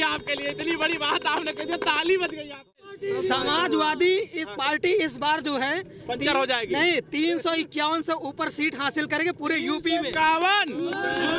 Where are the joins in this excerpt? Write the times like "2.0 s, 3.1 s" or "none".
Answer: 2.6 s